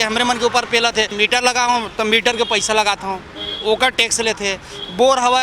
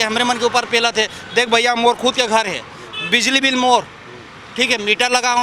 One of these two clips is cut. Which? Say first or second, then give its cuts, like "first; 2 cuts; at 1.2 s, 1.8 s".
first; 1 cut; at 1.1 s